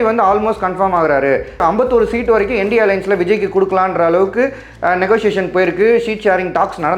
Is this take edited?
yes; 1 cut; at 1.6 s

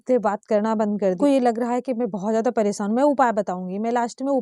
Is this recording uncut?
no; 1 cut; at 1.2 s

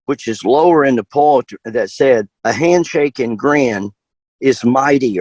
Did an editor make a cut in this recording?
yes; 1 cut; at 2.3 s

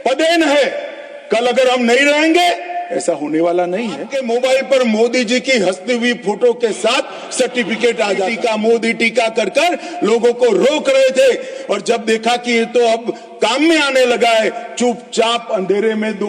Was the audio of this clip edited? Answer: yes; 2 cuts; at 4.1 s, 8.3 s

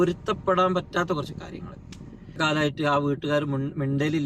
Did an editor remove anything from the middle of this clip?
yes; 1 cut; at 2.4 s

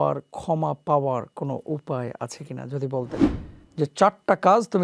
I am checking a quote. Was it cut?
yes; 1 cut; at 3.2 s

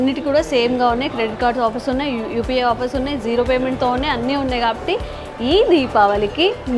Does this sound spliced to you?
no; 0 cuts

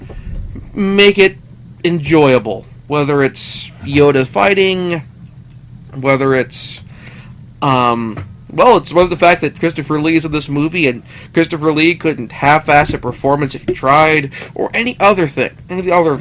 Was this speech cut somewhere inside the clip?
no; 0 cuts

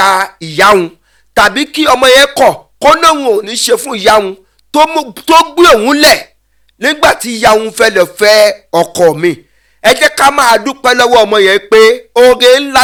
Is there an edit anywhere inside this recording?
no; 0 cuts

